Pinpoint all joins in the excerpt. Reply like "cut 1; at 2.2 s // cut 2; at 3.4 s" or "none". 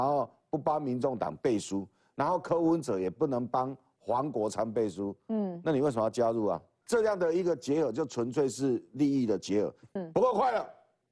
cut 1; at 6.7 s // cut 2; at 9.9 s